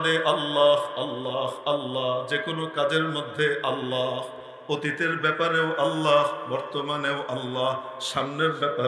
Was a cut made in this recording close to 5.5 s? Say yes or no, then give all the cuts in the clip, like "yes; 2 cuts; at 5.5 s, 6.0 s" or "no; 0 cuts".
no; 0 cuts